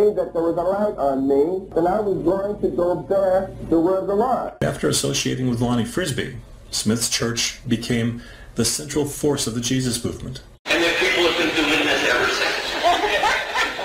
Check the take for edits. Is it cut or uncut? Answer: cut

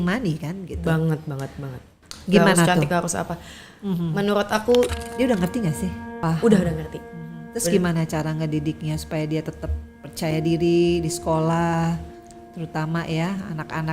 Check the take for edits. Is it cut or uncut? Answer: cut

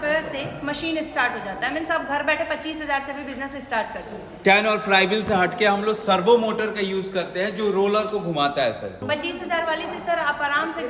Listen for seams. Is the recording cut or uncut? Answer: cut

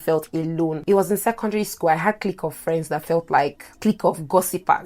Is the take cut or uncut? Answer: cut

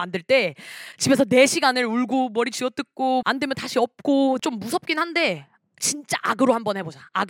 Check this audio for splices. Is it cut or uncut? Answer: cut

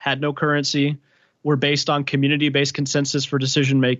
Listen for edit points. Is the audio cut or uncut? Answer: uncut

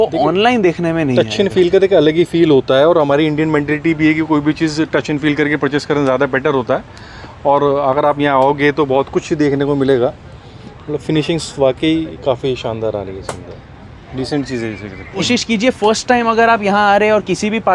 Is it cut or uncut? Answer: uncut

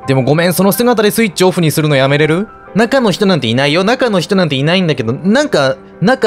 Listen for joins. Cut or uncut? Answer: cut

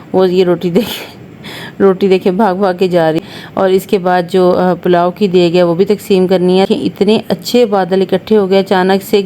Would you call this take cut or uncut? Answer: cut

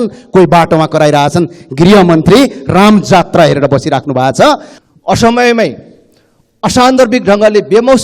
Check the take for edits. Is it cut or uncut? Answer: cut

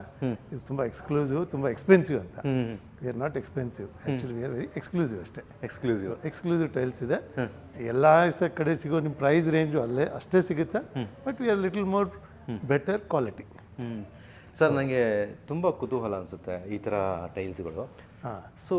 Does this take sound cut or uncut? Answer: uncut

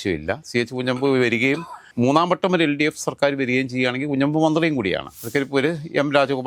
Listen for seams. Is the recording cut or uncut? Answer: cut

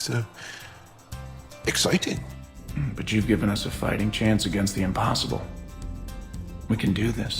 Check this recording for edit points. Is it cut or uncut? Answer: cut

